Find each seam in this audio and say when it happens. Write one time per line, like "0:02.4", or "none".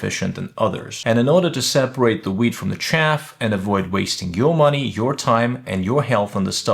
0:00.9